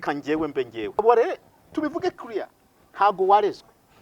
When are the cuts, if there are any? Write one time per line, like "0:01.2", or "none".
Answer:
0:01.0